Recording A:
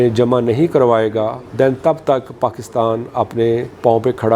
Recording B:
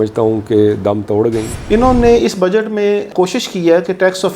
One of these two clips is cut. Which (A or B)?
B